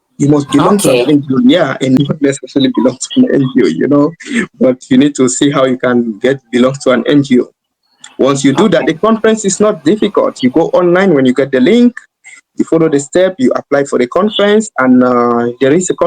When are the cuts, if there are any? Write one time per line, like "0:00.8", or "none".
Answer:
0:02.0